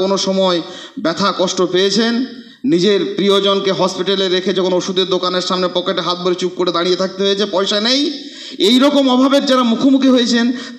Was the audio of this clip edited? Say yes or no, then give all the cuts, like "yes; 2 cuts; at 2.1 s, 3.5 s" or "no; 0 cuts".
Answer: no; 0 cuts